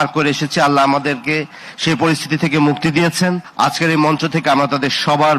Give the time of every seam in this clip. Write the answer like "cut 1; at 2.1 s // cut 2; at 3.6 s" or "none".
cut 1; at 3.4 s